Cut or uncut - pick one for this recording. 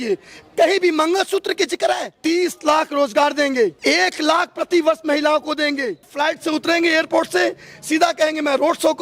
cut